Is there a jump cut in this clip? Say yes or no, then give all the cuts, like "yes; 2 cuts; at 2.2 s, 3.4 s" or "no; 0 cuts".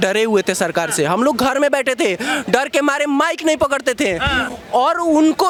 no; 0 cuts